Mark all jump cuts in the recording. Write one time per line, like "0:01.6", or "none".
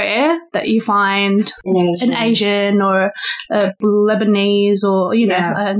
0:01.6
0:03.8